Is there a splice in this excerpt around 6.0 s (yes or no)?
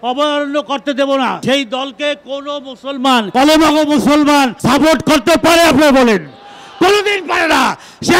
no